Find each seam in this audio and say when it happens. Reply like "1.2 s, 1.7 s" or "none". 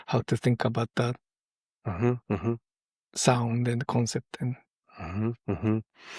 none